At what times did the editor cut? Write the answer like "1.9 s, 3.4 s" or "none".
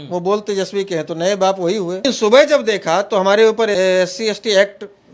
2.0 s, 3.7 s

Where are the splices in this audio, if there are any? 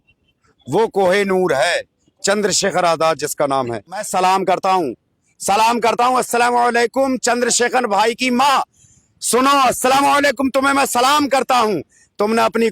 4.0 s

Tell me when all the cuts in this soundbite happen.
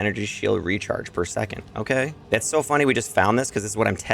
2.2 s

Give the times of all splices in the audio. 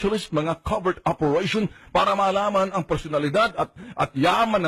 3.1 s

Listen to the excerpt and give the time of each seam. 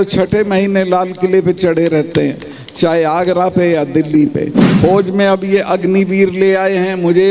4.6 s

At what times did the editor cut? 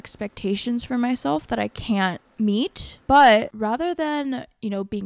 2.2 s, 3.5 s

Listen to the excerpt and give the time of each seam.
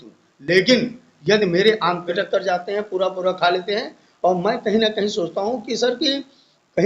2.2 s

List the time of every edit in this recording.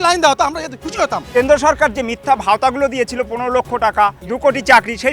1.3 s, 4.2 s

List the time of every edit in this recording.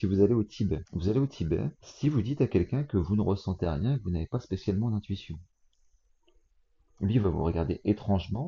0.9 s, 1.8 s

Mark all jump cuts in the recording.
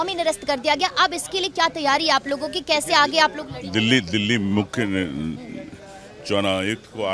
none

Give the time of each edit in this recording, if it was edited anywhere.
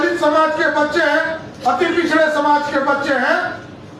none

